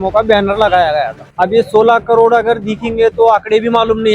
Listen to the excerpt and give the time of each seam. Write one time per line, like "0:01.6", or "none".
0:01.2